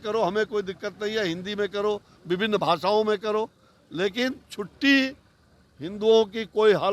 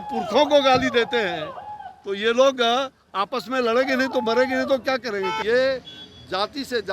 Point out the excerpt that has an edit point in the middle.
second; 1 cut; at 5.4 s

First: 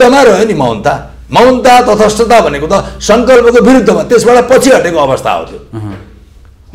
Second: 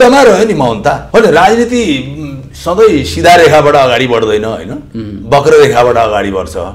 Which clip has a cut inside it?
second; 1 cut; at 1.0 s

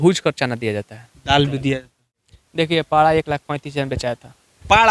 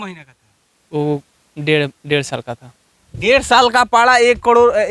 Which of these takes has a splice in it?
first; 1 cut; at 2.1 s

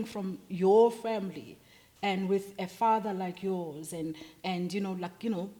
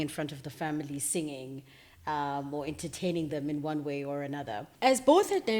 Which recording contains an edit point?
second; 1 cut; at 4.7 s

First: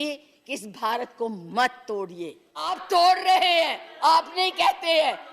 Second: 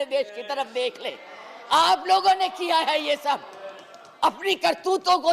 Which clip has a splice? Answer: first; 1 cut; at 2.8 s

